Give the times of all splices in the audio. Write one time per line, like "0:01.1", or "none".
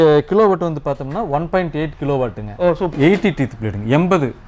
0:02.9